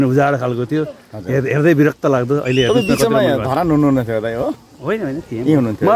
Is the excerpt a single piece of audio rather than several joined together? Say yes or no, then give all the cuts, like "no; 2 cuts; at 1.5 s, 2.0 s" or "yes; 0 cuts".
yes; 0 cuts